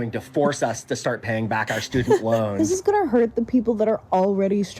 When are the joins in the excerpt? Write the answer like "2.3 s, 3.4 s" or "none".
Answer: 2.5 s